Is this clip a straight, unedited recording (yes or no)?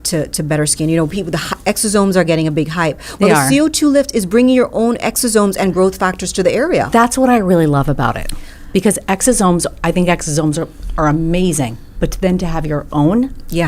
yes